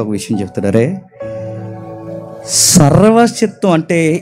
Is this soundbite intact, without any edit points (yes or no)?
yes